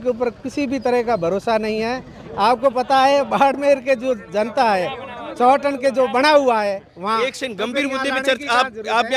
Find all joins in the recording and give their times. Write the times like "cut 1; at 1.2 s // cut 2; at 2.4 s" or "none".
none